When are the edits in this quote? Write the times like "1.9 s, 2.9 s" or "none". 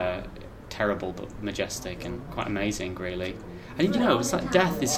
2.2 s